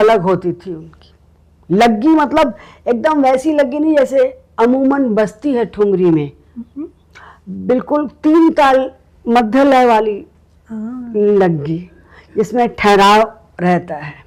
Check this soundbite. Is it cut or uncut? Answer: uncut